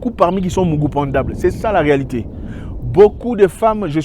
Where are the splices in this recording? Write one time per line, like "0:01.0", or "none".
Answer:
none